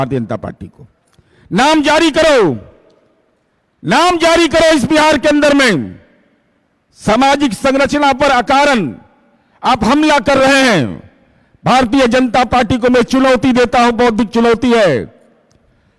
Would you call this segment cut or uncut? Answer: uncut